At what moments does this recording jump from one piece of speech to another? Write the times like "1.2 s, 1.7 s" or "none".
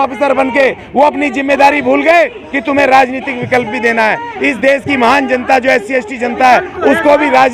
none